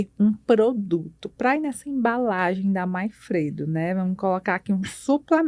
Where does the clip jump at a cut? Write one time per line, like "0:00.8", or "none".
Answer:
none